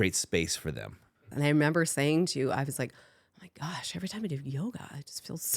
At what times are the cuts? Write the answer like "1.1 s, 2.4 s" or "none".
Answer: 1.2 s